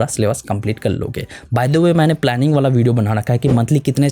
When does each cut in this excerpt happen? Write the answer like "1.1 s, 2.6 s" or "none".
none

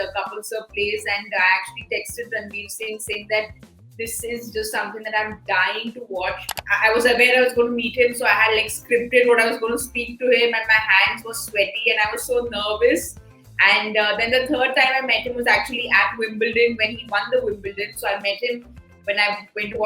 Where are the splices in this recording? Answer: 6.5 s

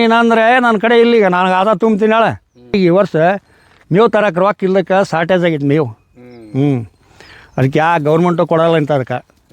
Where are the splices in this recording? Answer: 2.7 s

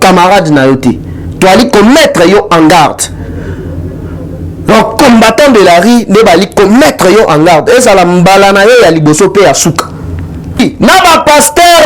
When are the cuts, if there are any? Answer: 10.3 s

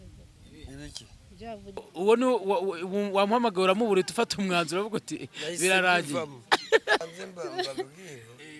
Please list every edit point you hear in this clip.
1.9 s, 7.1 s

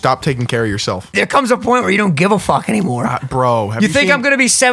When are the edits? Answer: 1.1 s

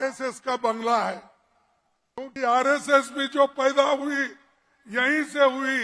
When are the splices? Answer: 2.2 s

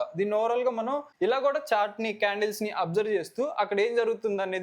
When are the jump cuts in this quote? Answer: 1.1 s

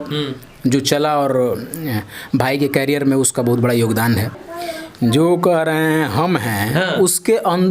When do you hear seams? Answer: 4.3 s

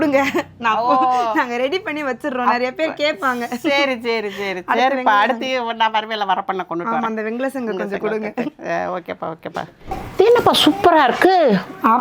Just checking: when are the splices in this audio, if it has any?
none

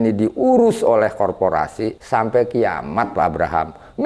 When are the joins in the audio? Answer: 2.0 s

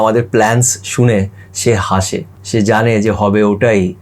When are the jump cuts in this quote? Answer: 2.3 s

